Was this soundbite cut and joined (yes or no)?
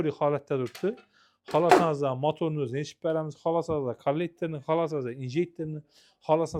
no